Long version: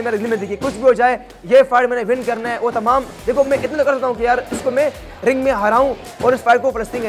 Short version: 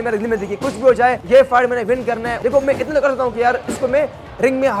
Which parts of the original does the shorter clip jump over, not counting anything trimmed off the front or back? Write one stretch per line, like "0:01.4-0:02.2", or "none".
0:01.2-0:01.4
0:02.5-0:03.1